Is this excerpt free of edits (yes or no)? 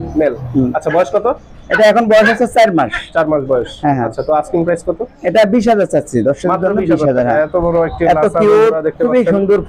yes